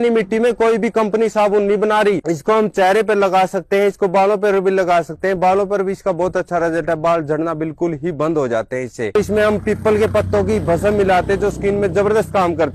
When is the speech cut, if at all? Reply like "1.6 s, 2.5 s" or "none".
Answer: 2.3 s, 9.1 s